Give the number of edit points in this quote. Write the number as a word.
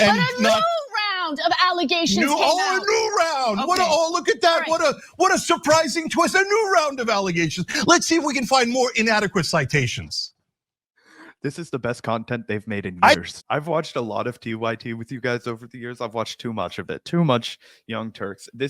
one